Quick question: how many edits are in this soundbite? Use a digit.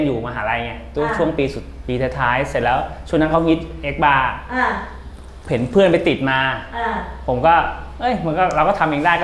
0